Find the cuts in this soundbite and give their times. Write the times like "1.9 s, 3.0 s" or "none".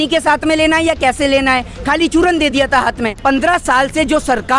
3.1 s